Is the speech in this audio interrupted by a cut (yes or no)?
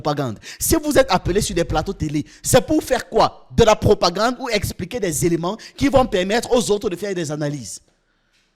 no